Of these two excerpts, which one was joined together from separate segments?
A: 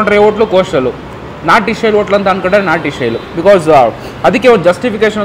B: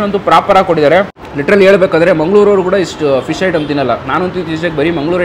B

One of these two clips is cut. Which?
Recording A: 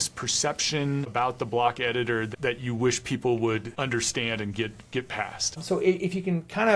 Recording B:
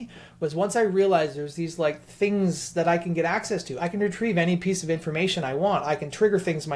A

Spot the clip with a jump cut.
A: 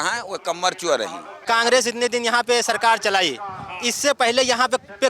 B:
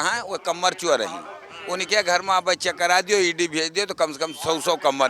A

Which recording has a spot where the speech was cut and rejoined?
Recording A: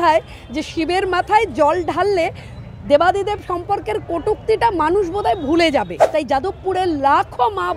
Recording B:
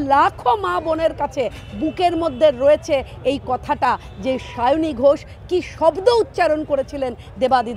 A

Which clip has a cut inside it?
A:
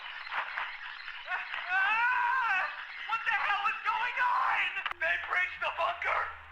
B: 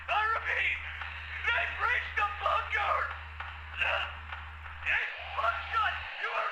A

